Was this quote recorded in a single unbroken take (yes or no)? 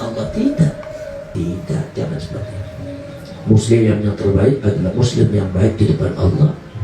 no